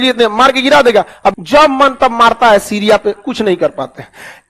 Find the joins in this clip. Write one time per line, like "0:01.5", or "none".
0:01.4